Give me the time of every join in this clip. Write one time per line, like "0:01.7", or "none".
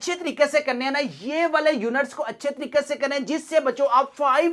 none